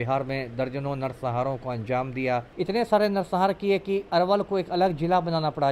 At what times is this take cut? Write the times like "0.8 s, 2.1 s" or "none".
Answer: 2.5 s